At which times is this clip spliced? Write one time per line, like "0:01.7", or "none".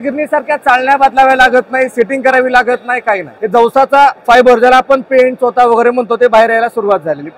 0:03.3